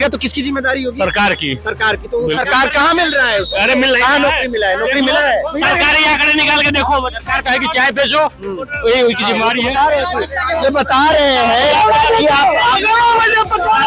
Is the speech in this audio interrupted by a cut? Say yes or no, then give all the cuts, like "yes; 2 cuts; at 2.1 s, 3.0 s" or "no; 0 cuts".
no; 0 cuts